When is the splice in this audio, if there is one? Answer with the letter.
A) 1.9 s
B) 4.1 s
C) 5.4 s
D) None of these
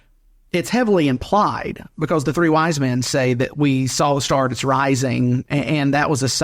C